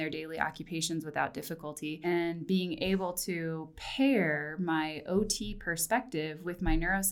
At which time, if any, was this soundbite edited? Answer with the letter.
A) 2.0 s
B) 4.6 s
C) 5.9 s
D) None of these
A